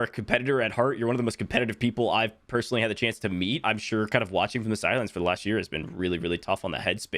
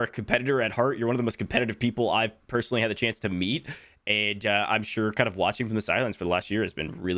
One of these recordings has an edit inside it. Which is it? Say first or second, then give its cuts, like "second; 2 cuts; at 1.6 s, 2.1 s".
first; 1 cut; at 3.6 s